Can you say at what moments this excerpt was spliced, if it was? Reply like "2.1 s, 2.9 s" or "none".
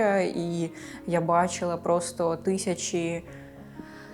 none